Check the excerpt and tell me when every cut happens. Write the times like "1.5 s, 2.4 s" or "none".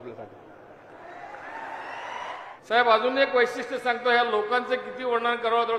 2.4 s